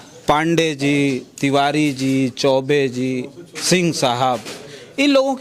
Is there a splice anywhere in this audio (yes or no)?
no